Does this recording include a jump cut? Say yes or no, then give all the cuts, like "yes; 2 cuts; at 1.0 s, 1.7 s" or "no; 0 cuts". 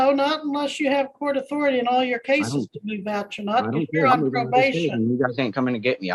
no; 0 cuts